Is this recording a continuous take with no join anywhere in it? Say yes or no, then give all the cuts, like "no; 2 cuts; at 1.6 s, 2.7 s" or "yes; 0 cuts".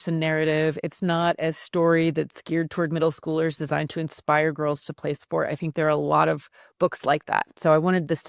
yes; 0 cuts